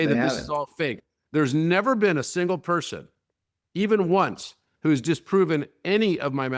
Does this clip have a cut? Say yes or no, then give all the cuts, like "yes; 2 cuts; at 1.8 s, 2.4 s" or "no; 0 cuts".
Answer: no; 0 cuts